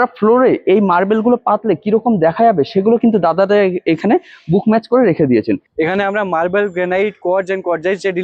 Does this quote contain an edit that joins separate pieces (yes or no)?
yes